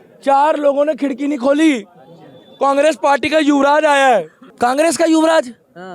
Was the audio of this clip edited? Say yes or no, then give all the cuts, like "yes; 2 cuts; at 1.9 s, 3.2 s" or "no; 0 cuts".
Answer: no; 0 cuts